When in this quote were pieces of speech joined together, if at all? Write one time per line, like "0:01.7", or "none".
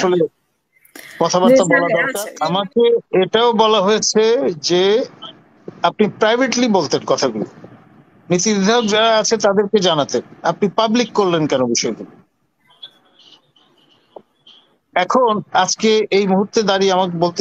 0:02.2